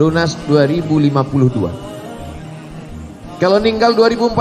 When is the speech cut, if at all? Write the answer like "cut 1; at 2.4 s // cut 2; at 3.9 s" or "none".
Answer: none